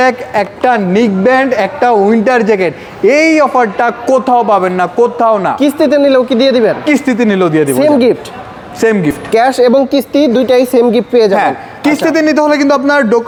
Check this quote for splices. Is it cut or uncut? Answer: uncut